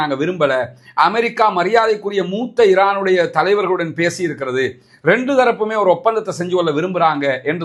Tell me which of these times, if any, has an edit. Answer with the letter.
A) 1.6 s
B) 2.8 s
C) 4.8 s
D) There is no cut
D